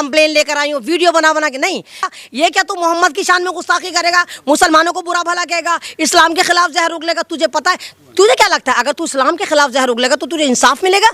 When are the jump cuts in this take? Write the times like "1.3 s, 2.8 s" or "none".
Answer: 2.1 s